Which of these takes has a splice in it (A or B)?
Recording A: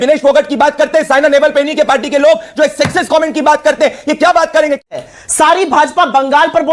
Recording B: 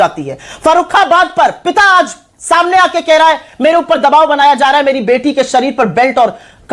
A